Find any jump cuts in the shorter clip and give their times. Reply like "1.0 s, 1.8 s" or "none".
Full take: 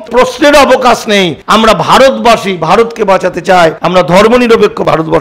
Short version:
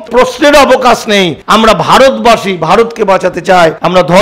none